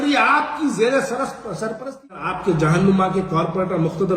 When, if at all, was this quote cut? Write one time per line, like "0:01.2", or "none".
0:02.2